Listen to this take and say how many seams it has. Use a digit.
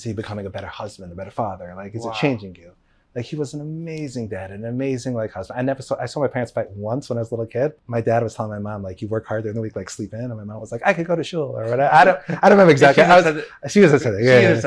1